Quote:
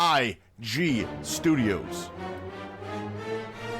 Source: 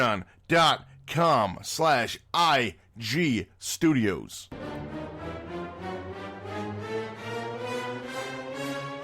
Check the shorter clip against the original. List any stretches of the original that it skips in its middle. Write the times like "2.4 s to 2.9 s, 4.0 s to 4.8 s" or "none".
4.2 s to 5.5 s